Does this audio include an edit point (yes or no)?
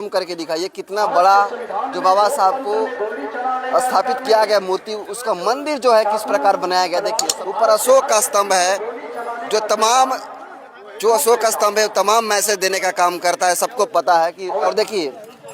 yes